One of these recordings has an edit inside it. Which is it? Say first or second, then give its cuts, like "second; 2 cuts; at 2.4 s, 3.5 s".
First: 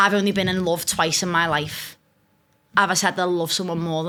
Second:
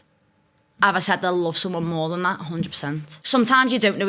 second; 1 cut; at 3.1 s